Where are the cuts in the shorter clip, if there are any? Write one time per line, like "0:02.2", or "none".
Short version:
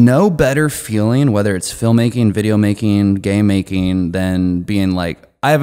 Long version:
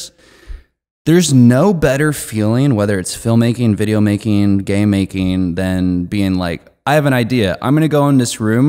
none